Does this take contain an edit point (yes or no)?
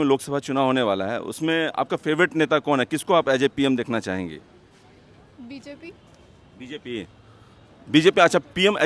yes